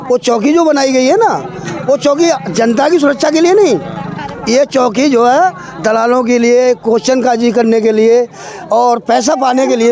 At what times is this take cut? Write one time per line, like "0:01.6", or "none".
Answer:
none